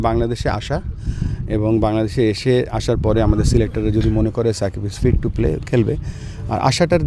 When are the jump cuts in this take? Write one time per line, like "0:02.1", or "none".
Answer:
none